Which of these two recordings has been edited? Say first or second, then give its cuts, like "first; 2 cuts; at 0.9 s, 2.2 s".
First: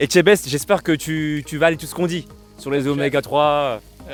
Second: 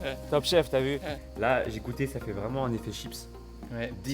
second; 1 cut; at 1.2 s